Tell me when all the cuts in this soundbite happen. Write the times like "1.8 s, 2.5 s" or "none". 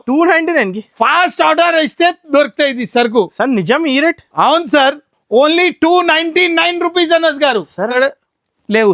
7.9 s